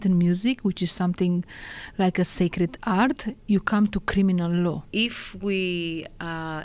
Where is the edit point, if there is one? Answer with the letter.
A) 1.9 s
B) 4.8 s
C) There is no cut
B